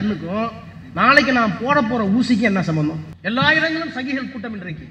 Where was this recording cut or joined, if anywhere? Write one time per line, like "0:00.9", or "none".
0:03.1